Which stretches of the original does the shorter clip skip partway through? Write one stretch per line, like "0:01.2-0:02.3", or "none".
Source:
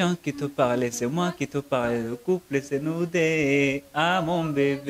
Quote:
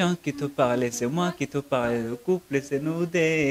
none